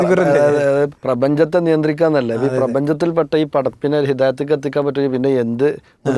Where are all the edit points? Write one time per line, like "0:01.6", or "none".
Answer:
0:01.0